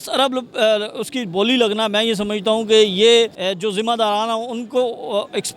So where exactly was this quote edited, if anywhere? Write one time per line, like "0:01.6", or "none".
0:03.4